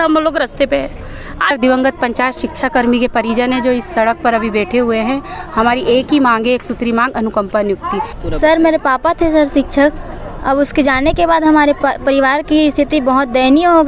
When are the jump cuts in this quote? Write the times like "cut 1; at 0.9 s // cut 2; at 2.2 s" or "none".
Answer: cut 1; at 1.5 s // cut 2; at 8.2 s